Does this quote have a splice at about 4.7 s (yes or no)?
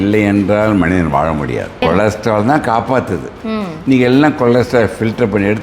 no